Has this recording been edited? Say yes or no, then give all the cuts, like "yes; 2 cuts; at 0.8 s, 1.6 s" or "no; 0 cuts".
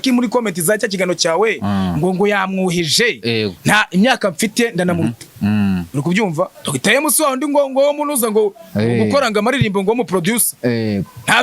yes; 1 cut; at 6.6 s